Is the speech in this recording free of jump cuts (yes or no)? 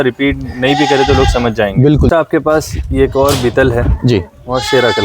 no